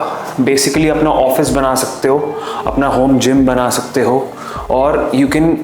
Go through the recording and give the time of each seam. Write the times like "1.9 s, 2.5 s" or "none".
none